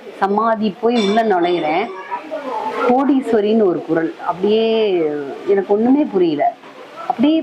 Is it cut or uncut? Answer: uncut